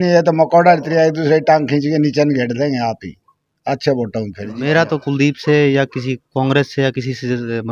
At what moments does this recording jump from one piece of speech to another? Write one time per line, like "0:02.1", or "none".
0:04.6